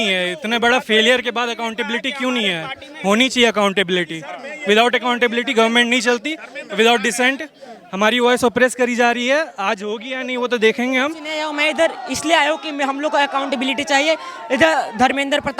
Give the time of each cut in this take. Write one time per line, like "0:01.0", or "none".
0:11.3